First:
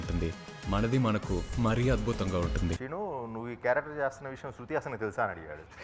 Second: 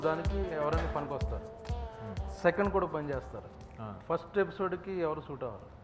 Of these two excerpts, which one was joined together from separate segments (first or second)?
first